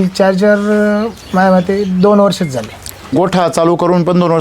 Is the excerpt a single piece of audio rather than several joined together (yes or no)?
no